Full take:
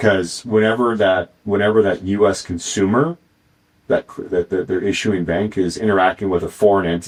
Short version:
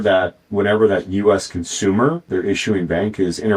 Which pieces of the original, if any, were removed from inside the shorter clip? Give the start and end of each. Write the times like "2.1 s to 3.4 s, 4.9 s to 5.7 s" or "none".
3.2 s to 4.7 s